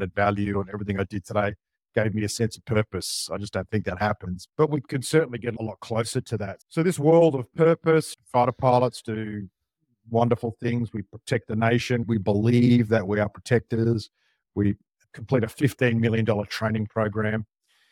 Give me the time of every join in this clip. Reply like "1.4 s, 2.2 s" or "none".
12.0 s, 14.9 s